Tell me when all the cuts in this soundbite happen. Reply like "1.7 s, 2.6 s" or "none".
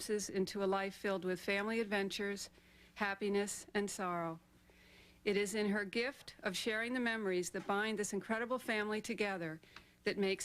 7.9 s